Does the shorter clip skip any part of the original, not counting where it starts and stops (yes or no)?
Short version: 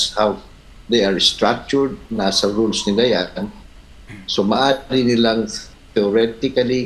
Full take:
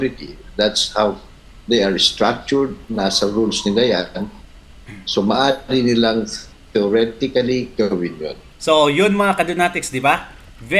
no